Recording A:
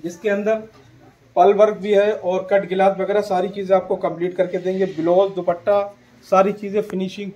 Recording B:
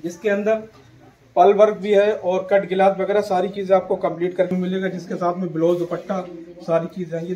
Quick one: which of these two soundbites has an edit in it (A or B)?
B